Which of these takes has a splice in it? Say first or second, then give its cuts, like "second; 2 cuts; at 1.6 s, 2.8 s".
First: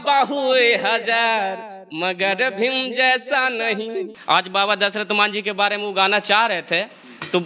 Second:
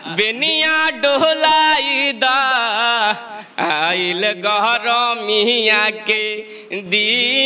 first; 1 cut; at 4.1 s